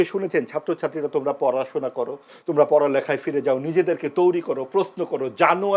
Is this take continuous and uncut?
yes; 0 cuts

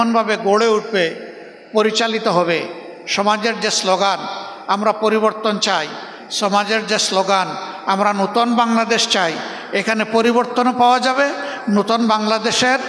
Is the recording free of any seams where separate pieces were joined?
yes; 0 cuts

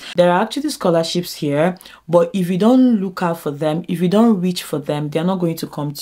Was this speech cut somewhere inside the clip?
no; 0 cuts

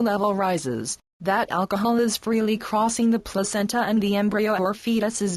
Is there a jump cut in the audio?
no; 0 cuts

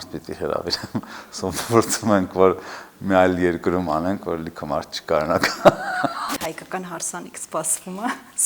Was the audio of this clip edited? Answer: yes; 1 cut; at 6.2 s

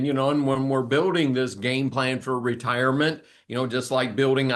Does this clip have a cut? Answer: no; 0 cuts

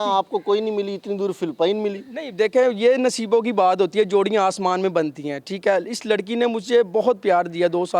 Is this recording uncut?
yes; 0 cuts

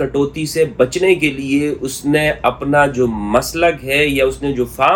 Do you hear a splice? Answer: no; 0 cuts

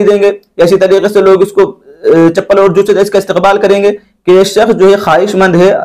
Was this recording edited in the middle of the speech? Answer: yes; 1 cut; at 4.1 s

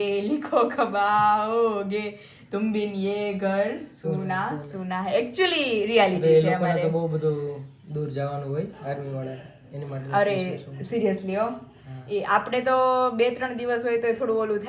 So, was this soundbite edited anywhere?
no; 0 cuts

